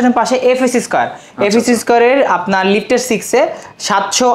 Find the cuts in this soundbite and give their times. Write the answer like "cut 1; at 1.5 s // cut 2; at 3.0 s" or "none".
none